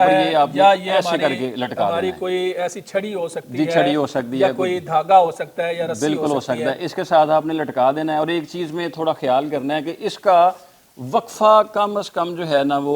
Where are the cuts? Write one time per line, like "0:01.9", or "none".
none